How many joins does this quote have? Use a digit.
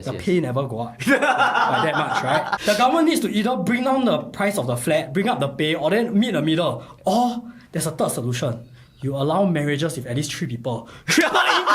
1